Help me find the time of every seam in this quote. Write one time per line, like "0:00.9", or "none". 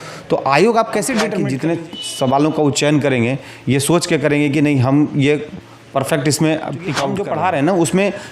0:01.3
0:07.1